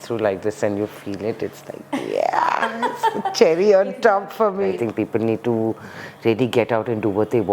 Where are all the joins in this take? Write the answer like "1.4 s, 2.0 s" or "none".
4.7 s

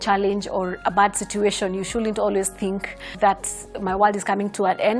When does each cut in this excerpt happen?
none

